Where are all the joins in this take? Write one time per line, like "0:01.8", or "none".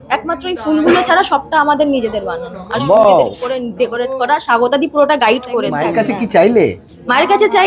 none

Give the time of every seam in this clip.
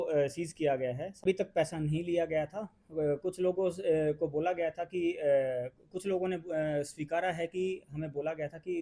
0:01.1

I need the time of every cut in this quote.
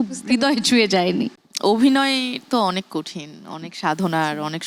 none

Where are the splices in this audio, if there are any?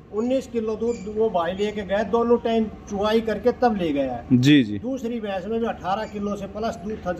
none

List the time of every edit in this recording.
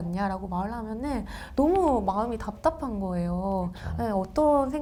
none

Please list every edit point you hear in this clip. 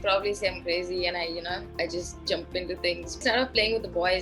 0:03.2

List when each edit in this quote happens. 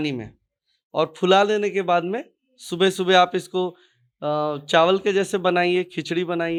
none

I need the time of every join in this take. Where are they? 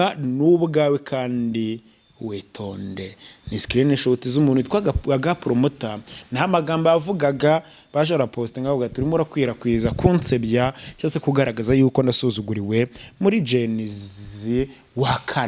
none

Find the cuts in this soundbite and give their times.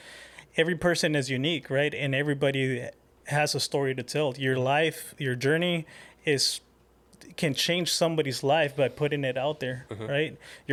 none

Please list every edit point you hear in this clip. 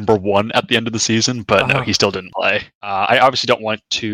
0:02.8

